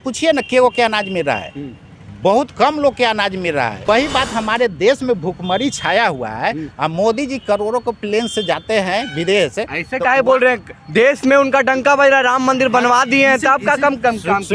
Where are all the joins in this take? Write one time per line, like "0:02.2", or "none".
0:03.9